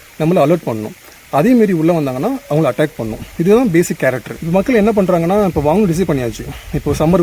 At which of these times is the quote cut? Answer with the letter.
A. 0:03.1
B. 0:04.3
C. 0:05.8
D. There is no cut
B